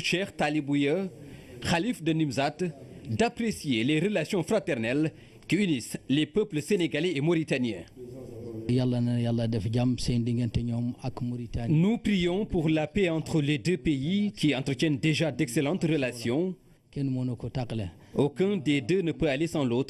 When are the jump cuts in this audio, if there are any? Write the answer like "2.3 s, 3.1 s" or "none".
13.1 s

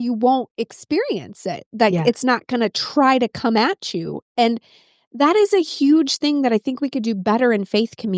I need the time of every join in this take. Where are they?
none

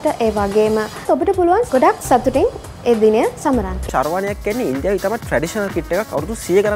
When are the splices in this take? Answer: 1.3 s, 3.8 s

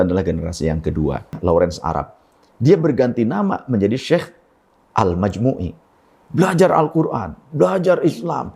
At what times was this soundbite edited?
1.4 s

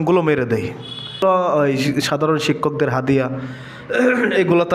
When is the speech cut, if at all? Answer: 1.2 s

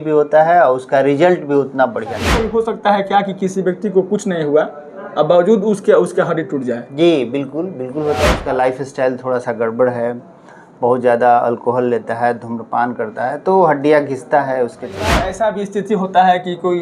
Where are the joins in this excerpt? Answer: 2.3 s, 8.4 s, 15.3 s

